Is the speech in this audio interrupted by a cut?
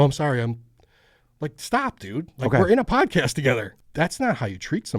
yes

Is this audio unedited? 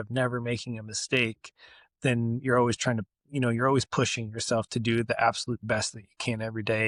yes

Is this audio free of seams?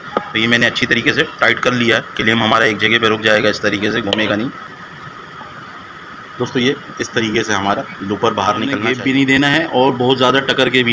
no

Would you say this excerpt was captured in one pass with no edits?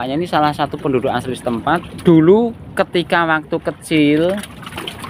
no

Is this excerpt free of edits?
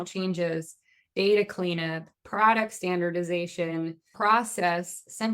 no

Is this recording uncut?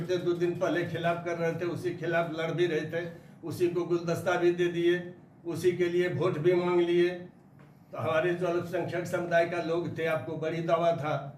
yes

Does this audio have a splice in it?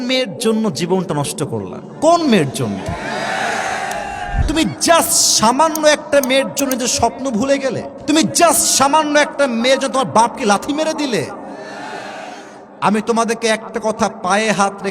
yes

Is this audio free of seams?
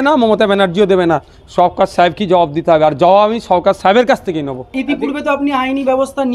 yes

